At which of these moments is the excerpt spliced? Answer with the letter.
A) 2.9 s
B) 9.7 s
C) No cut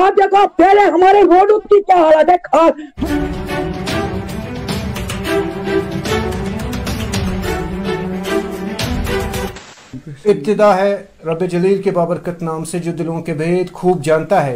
A